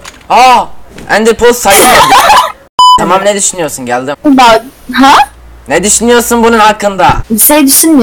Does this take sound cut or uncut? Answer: cut